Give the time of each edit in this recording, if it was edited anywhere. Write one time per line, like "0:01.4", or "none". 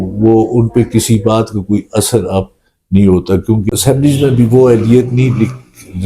0:03.6